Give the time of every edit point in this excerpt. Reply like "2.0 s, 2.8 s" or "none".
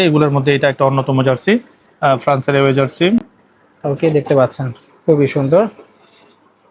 none